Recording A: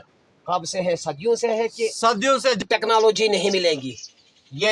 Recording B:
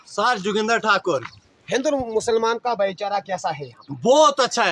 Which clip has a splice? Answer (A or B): A